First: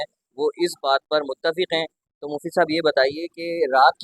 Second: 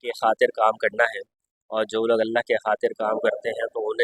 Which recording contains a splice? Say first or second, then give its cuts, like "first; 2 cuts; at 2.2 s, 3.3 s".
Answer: first; 1 cut; at 2.0 s